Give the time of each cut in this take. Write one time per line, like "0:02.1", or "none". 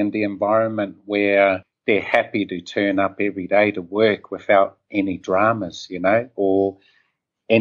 0:01.7